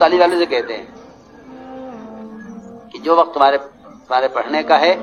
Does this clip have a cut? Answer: yes; 2 cuts; at 1.5 s, 2.9 s

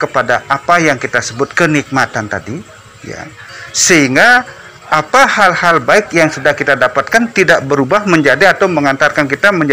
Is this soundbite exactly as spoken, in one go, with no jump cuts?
yes; 0 cuts

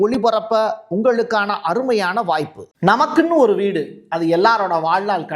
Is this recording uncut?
no; 1 cut; at 2.6 s

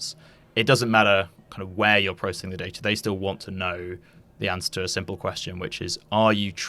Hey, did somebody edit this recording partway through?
no; 0 cuts

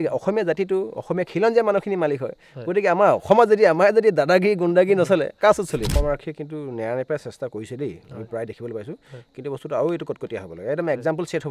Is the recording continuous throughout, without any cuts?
no; 1 cut; at 5.9 s

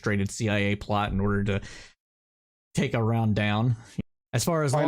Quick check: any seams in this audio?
yes; 1 cut; at 3.9 s

